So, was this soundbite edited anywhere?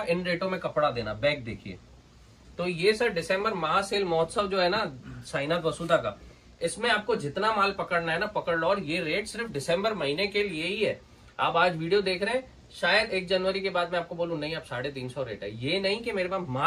no; 0 cuts

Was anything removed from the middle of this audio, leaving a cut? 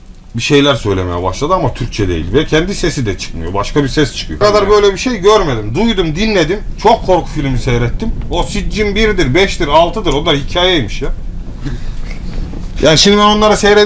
yes; 1 cut; at 4.4 s

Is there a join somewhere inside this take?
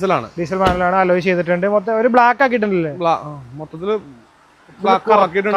no; 0 cuts

